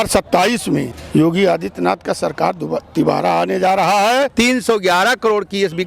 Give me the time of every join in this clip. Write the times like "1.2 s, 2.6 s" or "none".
1.0 s, 4.3 s